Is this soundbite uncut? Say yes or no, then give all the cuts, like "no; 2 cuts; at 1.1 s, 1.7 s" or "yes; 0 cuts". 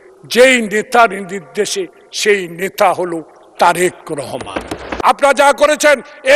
no; 1 cut; at 4.8 s